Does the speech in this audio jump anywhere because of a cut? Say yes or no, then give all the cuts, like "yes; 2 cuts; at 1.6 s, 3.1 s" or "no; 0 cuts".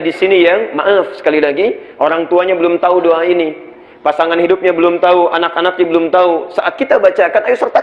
no; 0 cuts